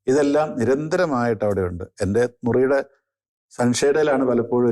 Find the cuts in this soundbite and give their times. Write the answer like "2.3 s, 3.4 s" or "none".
none